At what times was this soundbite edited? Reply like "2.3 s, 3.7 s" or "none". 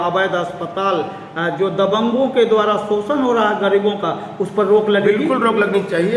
none

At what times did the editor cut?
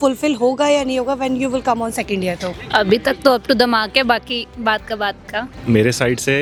none

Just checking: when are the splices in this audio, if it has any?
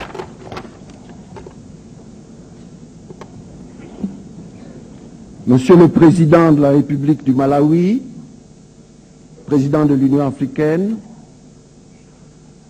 4.6 s

